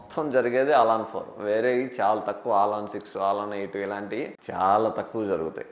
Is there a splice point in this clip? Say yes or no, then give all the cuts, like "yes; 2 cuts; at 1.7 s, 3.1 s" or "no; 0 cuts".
no; 0 cuts